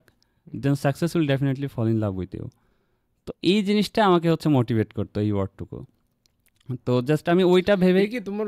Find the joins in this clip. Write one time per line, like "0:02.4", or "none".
none